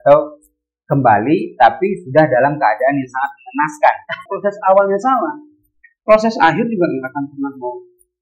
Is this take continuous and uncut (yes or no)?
no